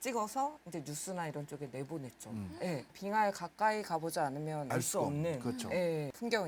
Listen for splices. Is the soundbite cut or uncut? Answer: uncut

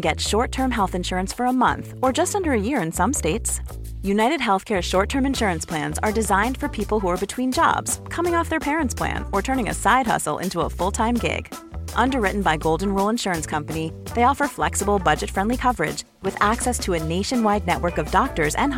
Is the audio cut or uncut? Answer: uncut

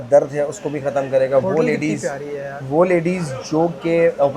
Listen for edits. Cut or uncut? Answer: uncut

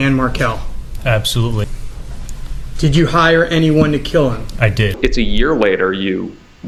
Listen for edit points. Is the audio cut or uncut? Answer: uncut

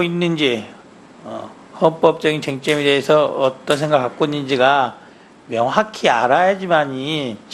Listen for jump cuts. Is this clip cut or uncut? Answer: uncut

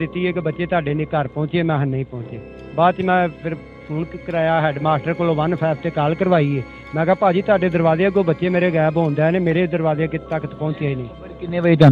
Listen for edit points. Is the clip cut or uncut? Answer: uncut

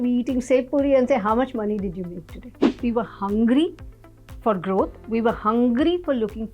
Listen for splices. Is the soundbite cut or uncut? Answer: cut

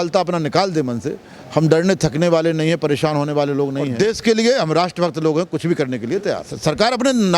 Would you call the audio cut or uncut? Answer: cut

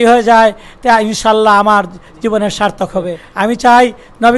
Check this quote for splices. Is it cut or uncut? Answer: cut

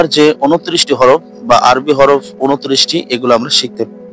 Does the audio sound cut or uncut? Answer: uncut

